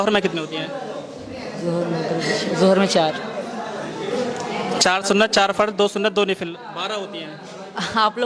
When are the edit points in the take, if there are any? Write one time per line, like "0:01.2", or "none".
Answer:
none